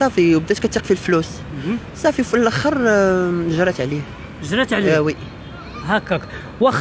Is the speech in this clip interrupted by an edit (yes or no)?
no